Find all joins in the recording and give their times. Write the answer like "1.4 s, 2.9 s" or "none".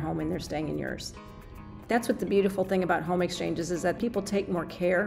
1.6 s, 4.0 s